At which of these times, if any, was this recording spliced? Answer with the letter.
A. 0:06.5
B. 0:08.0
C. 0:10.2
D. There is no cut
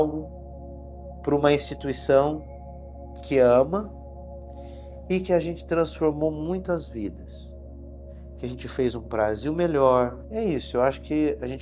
C